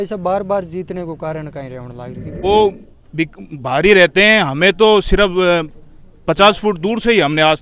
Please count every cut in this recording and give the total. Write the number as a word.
one